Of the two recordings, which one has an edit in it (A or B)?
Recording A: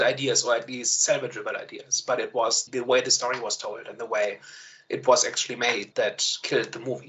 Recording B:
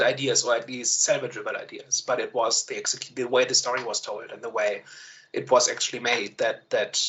A